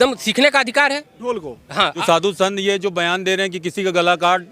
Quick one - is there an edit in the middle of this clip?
yes; 1 cut; at 2.0 s

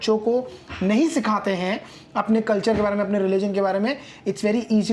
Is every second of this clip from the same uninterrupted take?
yes; 0 cuts

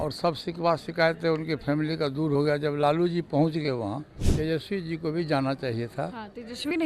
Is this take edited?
yes; 1 cut; at 4.2 s

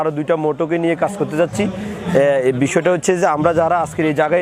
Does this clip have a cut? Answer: no; 0 cuts

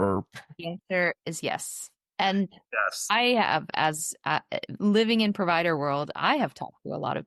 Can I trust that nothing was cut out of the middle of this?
yes; 0 cuts

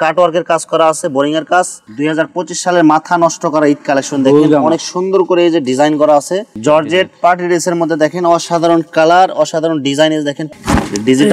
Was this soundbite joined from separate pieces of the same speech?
yes; 3 cuts; at 1.8 s, 6.5 s, 10.5 s

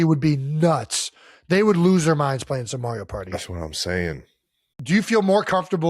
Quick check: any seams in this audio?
yes; 1 cut; at 4.7 s

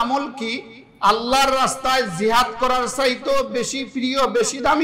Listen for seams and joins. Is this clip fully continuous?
yes; 0 cuts

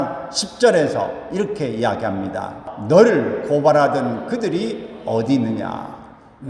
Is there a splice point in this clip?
yes; 1 cut; at 2.7 s

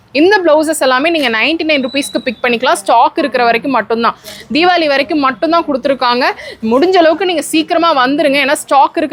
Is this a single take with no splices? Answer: yes; 0 cuts

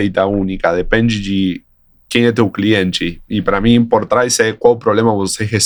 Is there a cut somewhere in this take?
no; 0 cuts

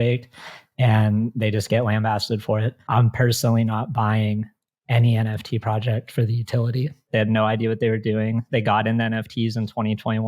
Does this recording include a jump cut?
yes; 2 cuts; at 2.8 s, 7.0 s

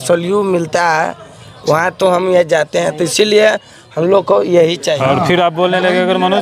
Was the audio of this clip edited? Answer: yes; 1 cut; at 5.0 s

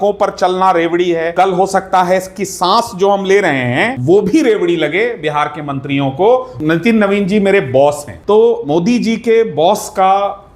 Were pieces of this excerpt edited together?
yes; 4 cuts; at 1.3 s, 3.9 s, 6.5 s, 8.1 s

